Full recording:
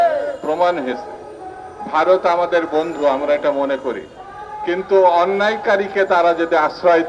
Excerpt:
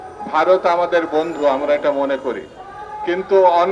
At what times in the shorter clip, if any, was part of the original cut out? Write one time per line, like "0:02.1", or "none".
none